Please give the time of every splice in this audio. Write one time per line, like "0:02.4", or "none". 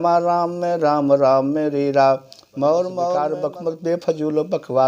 0:03.2